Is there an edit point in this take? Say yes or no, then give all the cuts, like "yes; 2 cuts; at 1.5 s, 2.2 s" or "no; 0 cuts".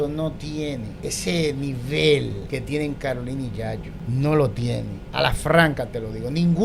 yes; 4 cuts; at 0.9 s, 2.4 s, 3.9 s, 5.0 s